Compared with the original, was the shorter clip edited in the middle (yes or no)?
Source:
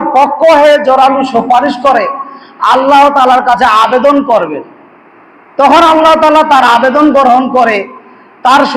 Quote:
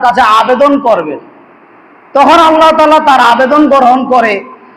no